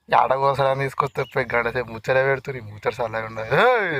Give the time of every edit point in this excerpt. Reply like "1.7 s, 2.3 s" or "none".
none